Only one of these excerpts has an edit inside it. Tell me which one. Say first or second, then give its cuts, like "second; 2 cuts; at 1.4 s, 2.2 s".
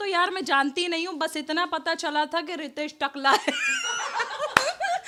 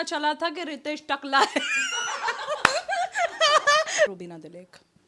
second; 1 cut; at 4.1 s